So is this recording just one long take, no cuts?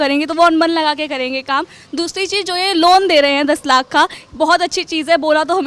yes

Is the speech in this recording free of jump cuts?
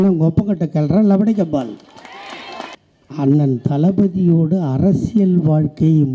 no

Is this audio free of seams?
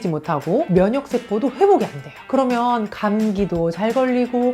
yes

